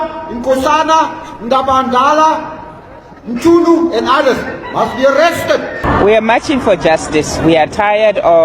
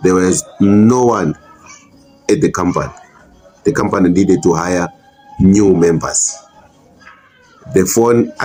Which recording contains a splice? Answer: first; 1 cut; at 5.7 s

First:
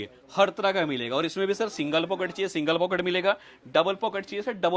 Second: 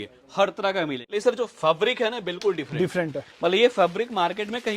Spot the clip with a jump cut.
second; 1 cut; at 1.0 s

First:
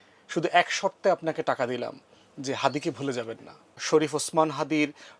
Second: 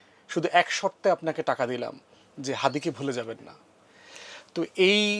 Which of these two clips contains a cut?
first; 1 cut; at 3.8 s

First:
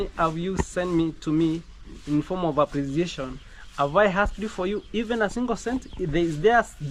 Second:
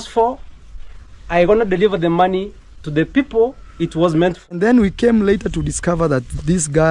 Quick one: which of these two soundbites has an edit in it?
second; 1 cut; at 4.6 s

